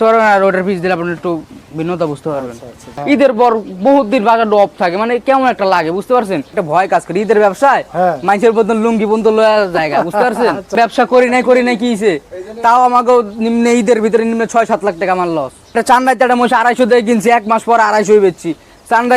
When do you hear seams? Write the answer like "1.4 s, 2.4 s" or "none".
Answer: 3.0 s, 6.6 s, 10.7 s, 15.7 s